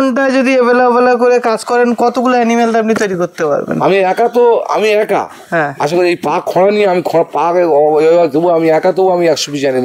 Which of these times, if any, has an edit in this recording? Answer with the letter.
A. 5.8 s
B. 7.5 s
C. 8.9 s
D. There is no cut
D